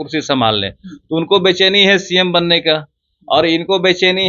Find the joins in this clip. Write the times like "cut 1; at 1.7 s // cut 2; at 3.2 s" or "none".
none